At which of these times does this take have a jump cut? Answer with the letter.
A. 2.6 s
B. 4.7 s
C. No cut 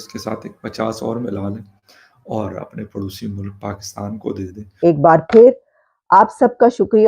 B